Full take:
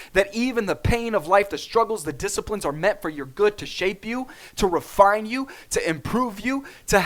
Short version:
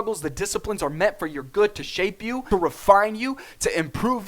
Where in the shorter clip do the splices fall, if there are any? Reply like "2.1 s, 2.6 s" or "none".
2.4 s